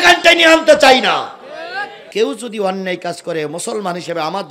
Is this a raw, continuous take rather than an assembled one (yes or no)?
no